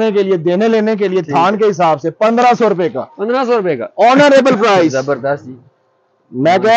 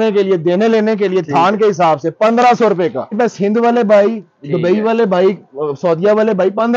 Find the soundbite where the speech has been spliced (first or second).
second